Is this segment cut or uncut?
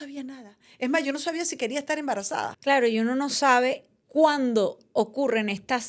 cut